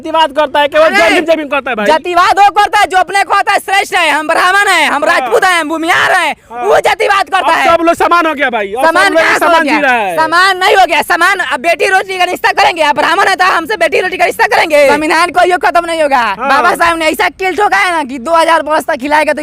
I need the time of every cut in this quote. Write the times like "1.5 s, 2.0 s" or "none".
14.9 s